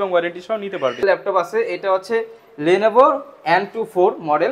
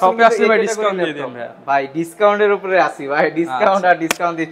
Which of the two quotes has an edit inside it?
first; 1 cut; at 1.0 s

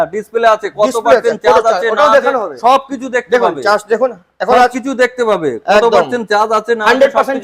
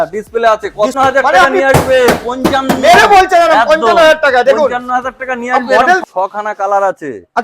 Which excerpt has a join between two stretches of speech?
second; 2 cuts; at 0.9 s, 6.0 s

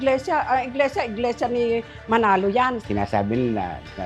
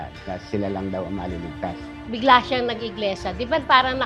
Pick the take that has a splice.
first; 1 cut; at 2.8 s

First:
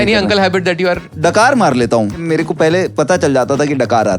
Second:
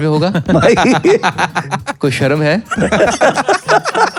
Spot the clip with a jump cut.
first; 2 cuts; at 1.1 s, 2.2 s

